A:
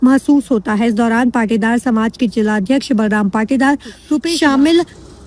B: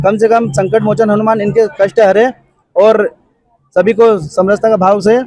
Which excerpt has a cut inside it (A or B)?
A